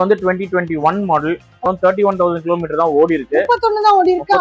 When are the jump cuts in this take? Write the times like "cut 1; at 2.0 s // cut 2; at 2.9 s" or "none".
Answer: cut 1; at 1.7 s